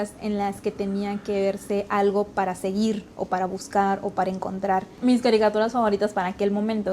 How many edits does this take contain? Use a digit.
1